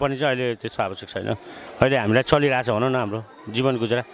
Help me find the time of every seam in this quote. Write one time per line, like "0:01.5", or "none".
none